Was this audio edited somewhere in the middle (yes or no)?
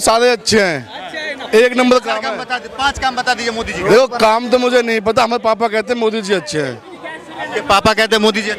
no